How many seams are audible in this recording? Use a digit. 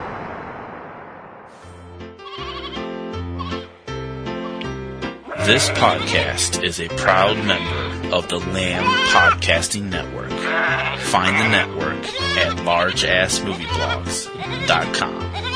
1